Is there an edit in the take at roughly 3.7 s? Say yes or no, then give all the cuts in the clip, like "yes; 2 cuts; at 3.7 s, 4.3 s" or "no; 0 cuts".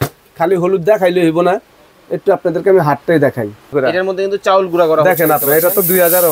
yes; 1 cut; at 3.7 s